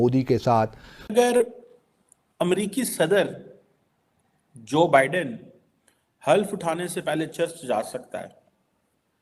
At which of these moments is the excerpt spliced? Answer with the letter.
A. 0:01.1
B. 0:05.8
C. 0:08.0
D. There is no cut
A